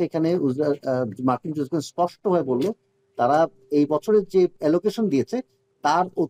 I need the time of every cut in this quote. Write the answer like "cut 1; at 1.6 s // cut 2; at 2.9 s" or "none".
cut 1; at 4.6 s